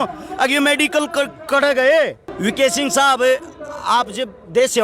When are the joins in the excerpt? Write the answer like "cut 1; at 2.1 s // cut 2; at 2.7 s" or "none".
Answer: cut 1; at 2.3 s